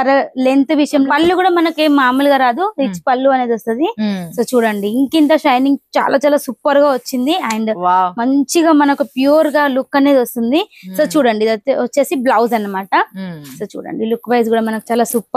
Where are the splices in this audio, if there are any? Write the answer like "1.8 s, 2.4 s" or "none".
1.1 s